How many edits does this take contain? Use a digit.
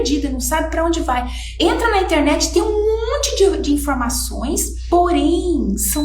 1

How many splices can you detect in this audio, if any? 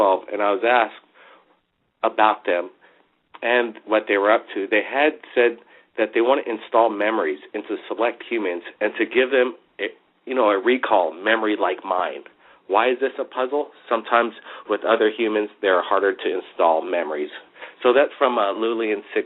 1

